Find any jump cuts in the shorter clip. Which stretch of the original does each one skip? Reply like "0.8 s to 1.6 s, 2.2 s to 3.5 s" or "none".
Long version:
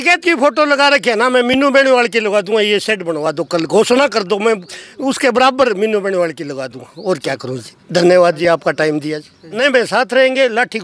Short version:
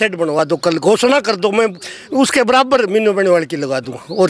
none